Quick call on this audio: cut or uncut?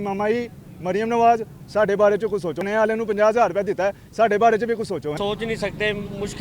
cut